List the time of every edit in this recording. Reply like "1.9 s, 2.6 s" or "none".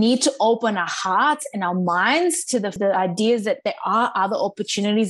2.8 s